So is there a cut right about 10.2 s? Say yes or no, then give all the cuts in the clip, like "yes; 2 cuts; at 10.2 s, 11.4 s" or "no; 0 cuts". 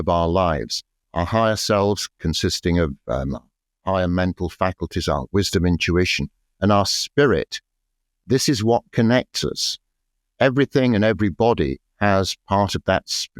no; 2 cuts; at 1.0 s, 8.2 s